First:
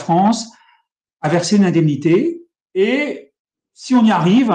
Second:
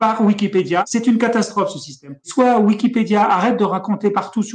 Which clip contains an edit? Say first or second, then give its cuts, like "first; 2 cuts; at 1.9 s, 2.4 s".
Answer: second; 2 cuts; at 0.9 s, 2.3 s